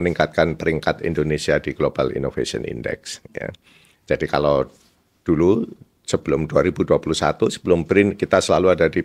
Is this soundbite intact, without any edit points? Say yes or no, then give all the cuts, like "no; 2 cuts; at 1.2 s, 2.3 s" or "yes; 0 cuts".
yes; 0 cuts